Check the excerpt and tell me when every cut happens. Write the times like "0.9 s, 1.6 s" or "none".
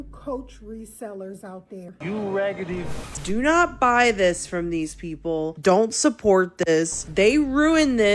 1.9 s, 3.2 s